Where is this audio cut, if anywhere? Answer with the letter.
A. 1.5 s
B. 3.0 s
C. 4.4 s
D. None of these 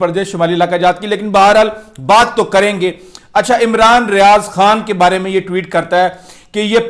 D